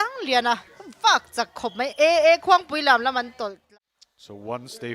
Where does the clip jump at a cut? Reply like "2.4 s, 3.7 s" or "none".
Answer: 3.6 s